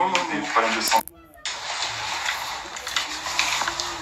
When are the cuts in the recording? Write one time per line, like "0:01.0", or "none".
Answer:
none